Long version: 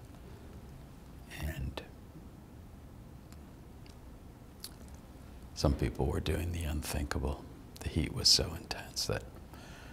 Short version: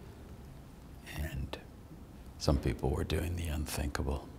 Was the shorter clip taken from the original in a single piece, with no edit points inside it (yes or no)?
no